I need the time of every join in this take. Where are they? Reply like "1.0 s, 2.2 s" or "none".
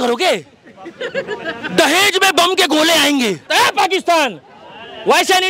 3.5 s

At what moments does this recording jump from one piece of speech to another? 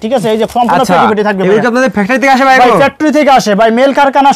none

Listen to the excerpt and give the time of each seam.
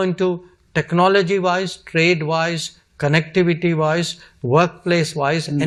none

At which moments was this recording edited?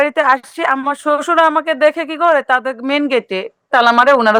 none

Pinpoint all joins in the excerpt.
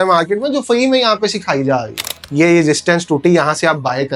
2.2 s

